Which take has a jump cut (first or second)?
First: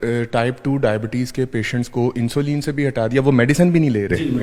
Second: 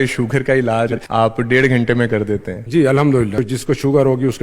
second